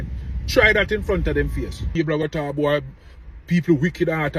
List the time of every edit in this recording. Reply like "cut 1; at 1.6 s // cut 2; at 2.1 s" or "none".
cut 1; at 1.9 s